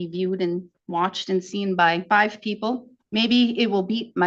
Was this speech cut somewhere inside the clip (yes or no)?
yes